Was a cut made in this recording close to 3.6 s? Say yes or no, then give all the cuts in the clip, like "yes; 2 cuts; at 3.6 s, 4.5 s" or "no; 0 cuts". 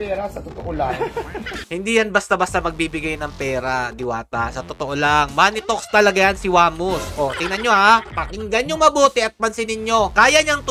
no; 1 cut; at 1.6 s